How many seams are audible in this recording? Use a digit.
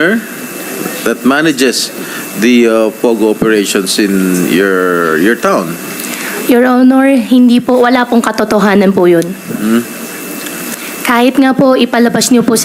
0